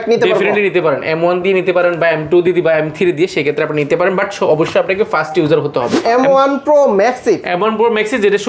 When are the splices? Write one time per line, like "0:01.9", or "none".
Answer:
0:05.9